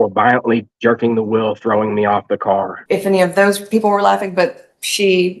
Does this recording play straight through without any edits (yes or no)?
no